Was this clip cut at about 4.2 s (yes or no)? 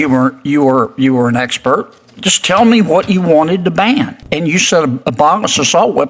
yes